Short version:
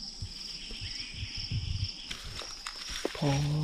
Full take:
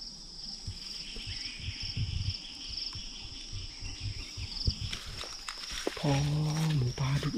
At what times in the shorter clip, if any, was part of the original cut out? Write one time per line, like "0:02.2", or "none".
0:02.1